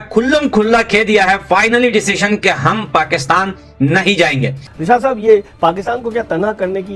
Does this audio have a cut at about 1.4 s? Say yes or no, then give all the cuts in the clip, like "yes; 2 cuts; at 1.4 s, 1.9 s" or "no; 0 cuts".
no; 1 cut; at 4.6 s